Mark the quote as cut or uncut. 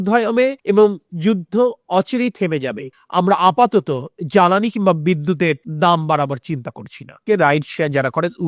cut